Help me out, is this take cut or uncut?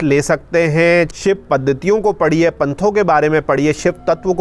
cut